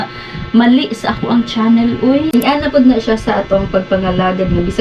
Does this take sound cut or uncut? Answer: cut